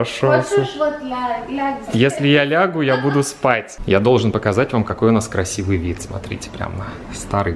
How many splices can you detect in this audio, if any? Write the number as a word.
one